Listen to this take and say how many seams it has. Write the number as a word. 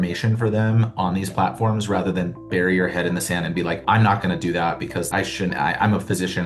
one